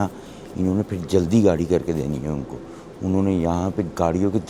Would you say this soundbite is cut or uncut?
uncut